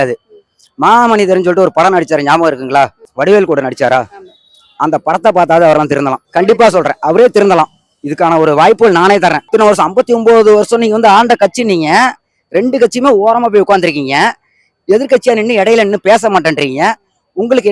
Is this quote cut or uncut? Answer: cut